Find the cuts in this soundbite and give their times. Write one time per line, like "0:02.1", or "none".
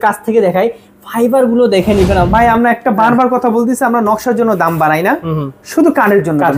0:02.3